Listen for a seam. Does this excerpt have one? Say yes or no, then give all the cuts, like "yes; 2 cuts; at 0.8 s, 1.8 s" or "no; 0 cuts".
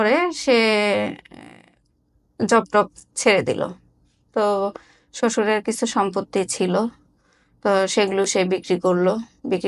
no; 0 cuts